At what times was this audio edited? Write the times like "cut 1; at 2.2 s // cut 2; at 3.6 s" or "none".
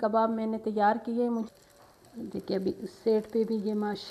cut 1; at 1.4 s